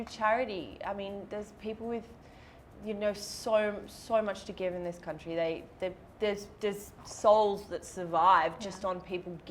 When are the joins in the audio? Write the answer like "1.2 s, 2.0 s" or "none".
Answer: none